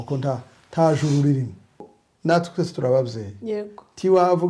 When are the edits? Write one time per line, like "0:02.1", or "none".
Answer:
0:01.9